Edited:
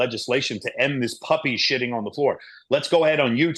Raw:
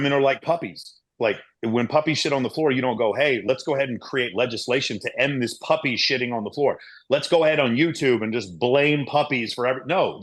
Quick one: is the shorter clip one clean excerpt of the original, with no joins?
yes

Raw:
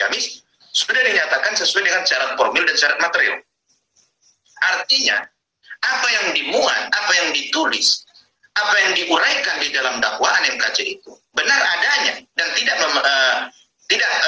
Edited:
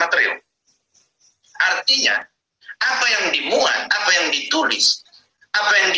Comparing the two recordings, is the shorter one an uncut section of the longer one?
yes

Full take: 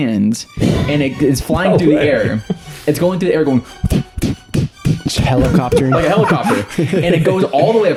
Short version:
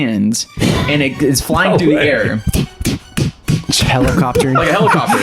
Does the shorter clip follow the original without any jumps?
no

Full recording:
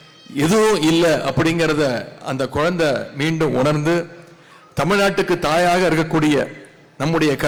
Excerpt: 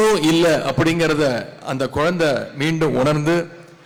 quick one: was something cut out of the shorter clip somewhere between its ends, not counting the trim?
no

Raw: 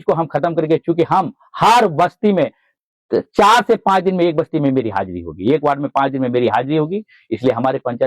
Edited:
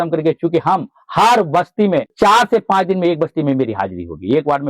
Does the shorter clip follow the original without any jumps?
no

